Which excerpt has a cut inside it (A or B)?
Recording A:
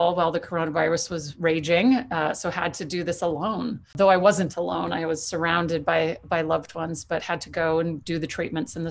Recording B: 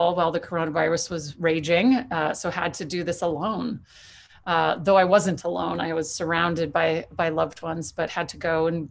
A